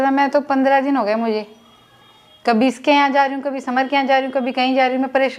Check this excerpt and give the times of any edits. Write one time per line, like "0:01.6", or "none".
none

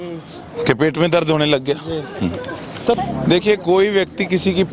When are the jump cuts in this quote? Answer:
0:03.0

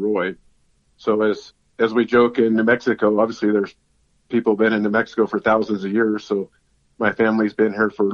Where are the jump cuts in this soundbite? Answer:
0:01.5

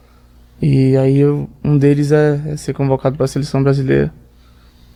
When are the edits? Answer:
none

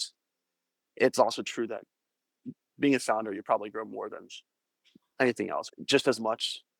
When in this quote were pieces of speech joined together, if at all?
0:02.6
0:05.7

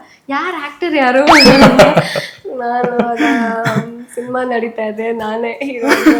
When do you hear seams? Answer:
none

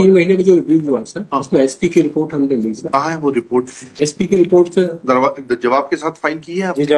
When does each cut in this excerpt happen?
none

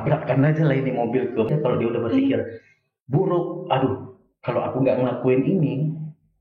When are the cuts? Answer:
0:01.5

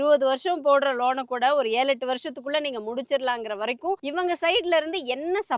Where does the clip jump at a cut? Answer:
0:04.0

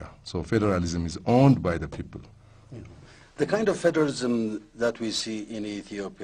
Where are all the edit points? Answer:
0:04.2

